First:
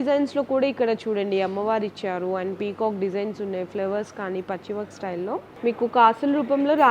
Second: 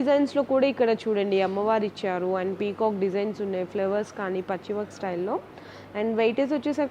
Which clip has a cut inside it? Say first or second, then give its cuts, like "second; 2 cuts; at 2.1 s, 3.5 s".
first; 1 cut; at 5.6 s